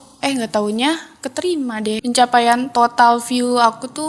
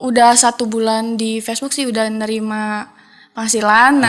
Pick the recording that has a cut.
first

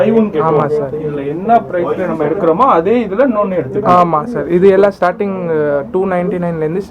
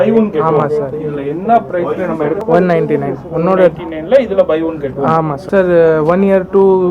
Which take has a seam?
second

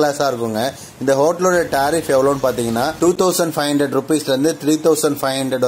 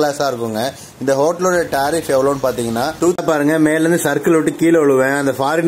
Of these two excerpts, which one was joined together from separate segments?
second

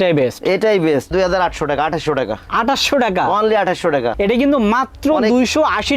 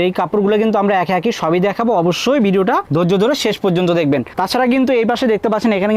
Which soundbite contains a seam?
first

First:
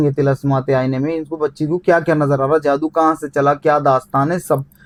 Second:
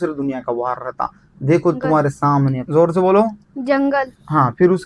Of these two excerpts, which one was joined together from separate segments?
second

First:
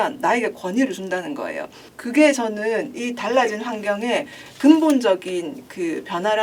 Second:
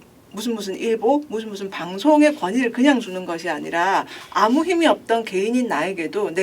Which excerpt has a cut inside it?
second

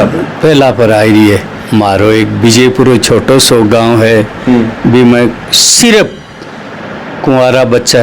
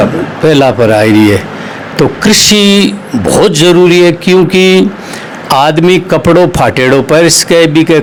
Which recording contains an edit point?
first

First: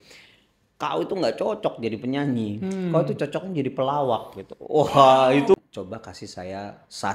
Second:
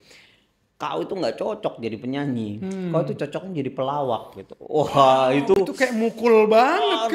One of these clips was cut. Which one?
first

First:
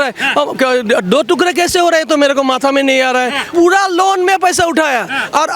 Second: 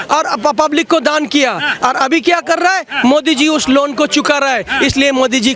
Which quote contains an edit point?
first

